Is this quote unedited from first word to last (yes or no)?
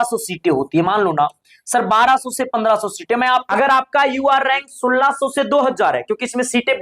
no